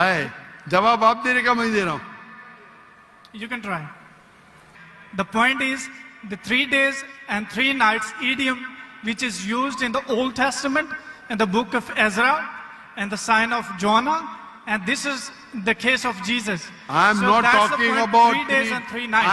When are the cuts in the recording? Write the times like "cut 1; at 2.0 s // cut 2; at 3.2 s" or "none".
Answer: cut 1; at 4.6 s